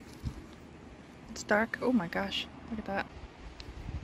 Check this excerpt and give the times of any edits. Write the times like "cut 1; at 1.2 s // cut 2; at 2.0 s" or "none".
cut 1; at 3.1 s